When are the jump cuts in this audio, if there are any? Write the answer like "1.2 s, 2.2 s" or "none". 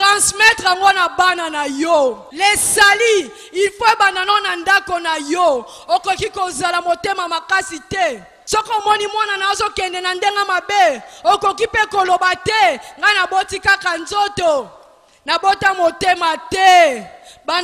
2.3 s, 8.3 s

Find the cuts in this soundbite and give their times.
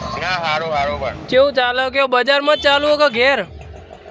none

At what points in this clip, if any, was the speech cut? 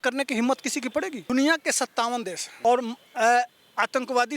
1.2 s, 2.4 s

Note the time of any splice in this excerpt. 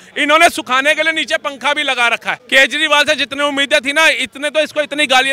2.3 s

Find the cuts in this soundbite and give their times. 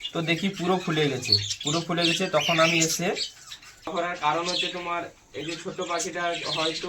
3.9 s

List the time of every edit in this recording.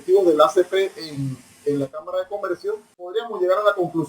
2.9 s

